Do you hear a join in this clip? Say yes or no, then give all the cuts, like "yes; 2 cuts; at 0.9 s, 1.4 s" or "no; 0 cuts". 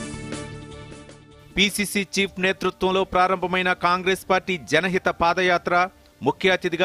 yes; 1 cut; at 1.3 s